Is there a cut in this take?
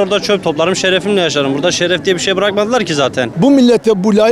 yes; 1 cut; at 3.3 s

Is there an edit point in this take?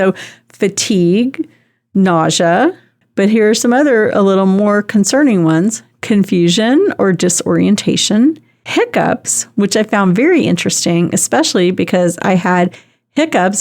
yes; 1 cut; at 3.0 s

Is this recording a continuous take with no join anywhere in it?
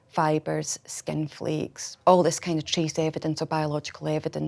no; 1 cut; at 1.8 s

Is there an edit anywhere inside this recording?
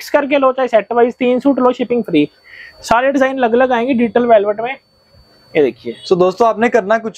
no; 0 cuts

